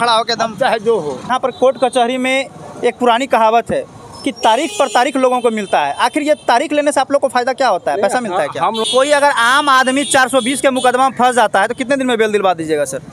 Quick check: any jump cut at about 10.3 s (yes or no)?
no